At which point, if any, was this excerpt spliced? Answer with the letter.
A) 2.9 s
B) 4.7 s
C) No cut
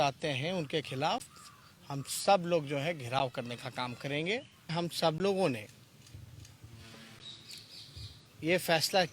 B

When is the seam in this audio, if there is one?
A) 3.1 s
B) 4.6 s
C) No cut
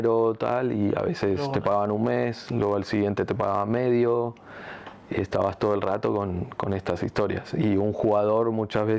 C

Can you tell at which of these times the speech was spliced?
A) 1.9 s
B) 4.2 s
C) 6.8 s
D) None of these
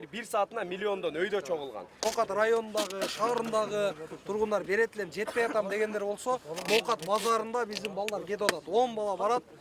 A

